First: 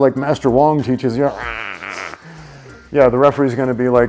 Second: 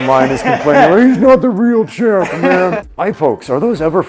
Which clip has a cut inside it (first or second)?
second